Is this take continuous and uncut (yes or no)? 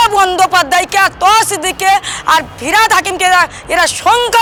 yes